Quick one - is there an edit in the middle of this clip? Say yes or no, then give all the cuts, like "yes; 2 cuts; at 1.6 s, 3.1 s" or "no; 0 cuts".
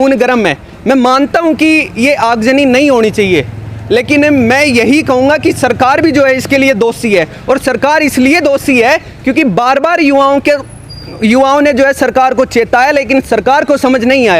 no; 0 cuts